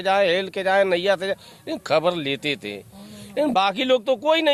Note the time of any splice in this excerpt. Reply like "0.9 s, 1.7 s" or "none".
none